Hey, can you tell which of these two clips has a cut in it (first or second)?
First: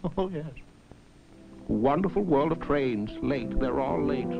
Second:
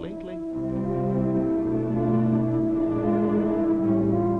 first